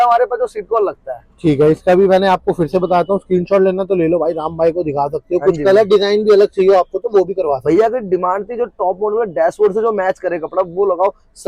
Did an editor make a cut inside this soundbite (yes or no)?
no